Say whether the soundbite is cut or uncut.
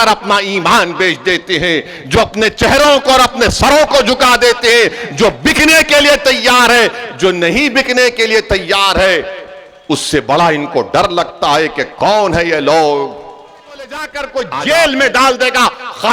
cut